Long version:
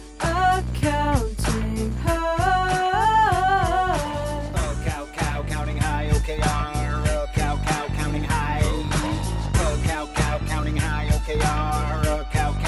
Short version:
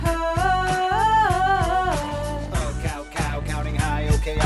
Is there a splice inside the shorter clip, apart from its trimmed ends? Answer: no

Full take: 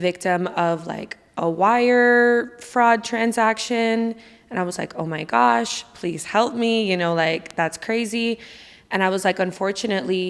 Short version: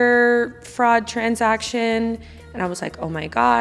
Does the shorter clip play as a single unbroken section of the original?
yes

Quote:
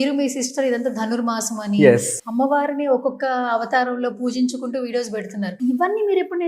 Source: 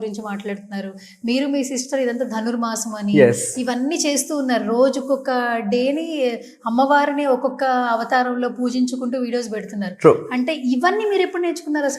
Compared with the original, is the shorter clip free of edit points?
no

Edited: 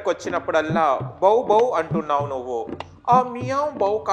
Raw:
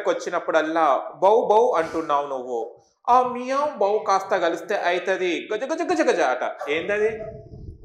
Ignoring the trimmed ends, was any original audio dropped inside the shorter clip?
no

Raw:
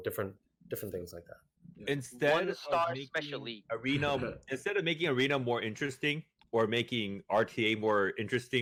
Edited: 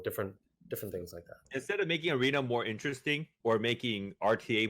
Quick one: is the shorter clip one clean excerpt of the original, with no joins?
no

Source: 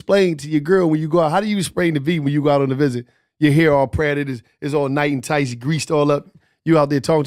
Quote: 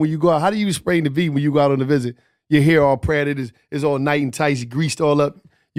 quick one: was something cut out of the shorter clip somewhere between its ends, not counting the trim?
no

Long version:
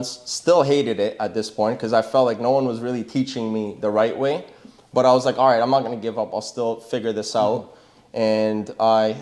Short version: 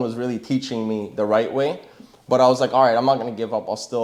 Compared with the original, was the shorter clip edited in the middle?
no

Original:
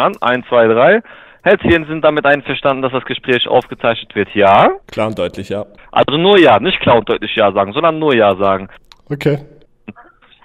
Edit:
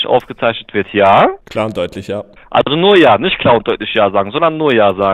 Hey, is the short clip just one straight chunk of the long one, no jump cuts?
yes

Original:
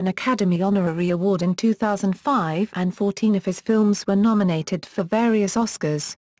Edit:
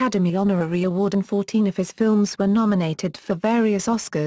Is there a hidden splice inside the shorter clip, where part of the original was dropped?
yes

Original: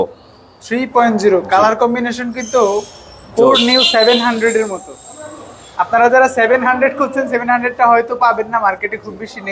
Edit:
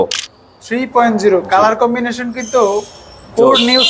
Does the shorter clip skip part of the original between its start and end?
no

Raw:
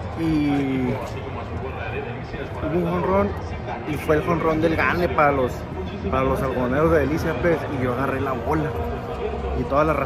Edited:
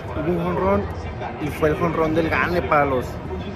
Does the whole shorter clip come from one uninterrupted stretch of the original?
yes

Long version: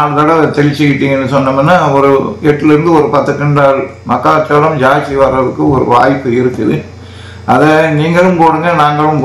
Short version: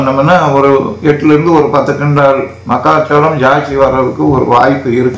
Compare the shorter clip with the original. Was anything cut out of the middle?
no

